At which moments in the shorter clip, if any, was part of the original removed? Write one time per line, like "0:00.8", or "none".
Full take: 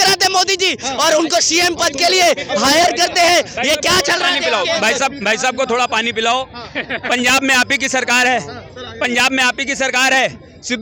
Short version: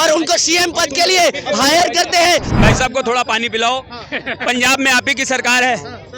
0:02.5